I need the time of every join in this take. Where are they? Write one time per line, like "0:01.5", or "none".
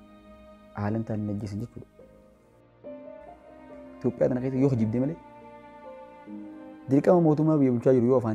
0:01.9
0:04.0